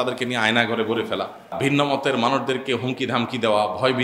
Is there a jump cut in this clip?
yes; 1 cut; at 1.5 s

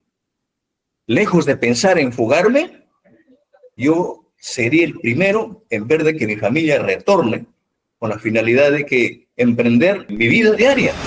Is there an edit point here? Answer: yes; 1 cut; at 10.1 s

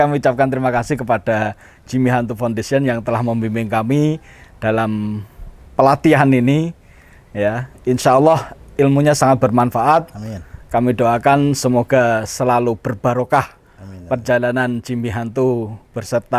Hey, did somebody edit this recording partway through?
no; 0 cuts

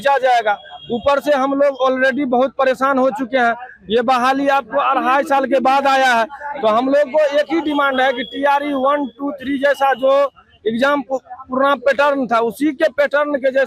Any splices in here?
no; 0 cuts

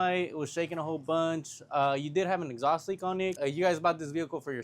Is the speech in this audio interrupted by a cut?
yes; 1 cut; at 3.3 s

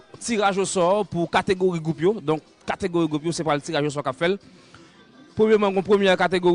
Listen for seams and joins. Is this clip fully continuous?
yes; 0 cuts

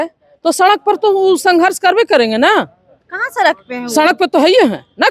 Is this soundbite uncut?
yes; 0 cuts

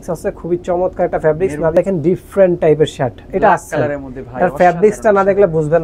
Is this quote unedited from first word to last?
no; 1 cut; at 1.7 s

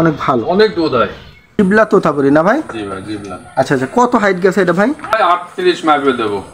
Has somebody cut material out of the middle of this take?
yes; 2 cuts; at 1.6 s, 5.1 s

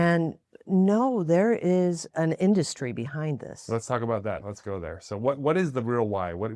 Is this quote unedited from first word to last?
no; 2 cuts; at 2.1 s, 4.5 s

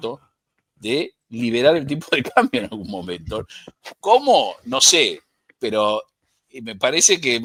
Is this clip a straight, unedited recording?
yes; 0 cuts

